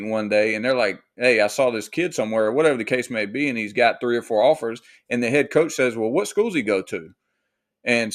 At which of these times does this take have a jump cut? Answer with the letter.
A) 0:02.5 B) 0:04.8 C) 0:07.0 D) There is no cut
D